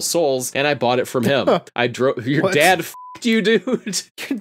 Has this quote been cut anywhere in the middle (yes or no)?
no